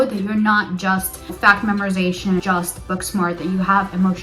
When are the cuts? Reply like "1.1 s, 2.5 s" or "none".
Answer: 1.3 s, 2.4 s

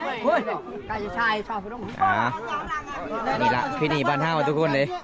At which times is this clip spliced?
none

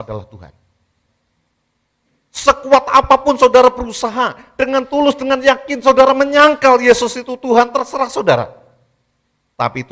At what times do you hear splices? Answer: none

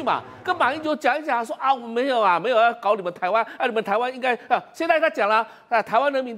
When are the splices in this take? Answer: none

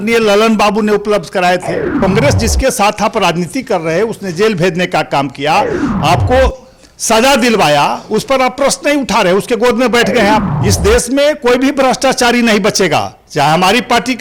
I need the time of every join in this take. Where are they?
1.9 s, 10.6 s

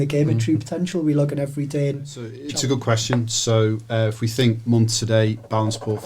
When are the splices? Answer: 2.4 s

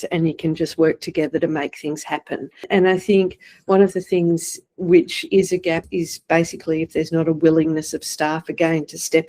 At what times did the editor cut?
2.7 s, 5.8 s

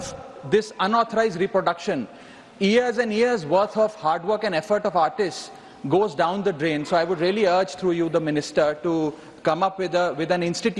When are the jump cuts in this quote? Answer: none

